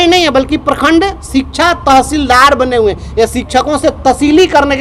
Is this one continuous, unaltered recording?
yes; 0 cuts

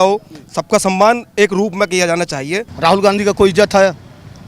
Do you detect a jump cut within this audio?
yes; 1 cut; at 2.7 s

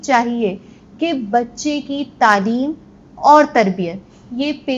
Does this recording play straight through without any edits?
yes; 0 cuts

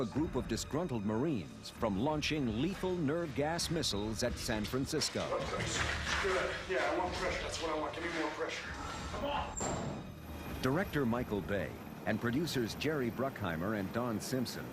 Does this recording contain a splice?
yes; 1 cut; at 8.4 s

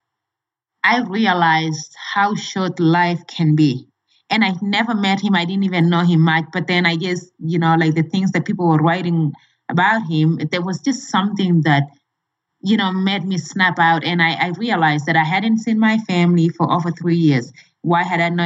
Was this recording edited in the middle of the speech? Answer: no; 0 cuts

